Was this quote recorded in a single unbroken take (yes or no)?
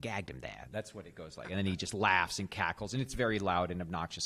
yes